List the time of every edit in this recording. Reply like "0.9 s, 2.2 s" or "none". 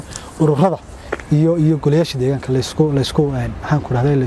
none